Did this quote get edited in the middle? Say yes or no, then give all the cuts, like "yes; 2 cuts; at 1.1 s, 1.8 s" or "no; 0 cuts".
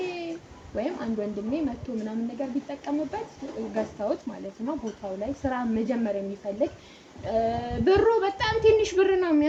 no; 0 cuts